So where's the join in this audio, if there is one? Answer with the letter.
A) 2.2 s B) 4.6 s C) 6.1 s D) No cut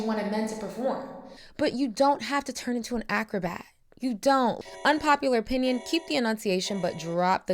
B